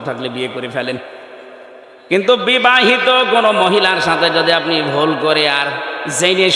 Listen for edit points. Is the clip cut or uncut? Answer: uncut